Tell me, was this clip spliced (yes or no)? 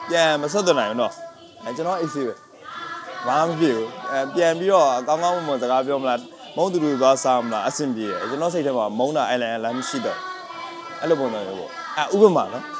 no